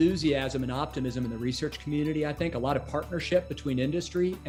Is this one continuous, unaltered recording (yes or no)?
yes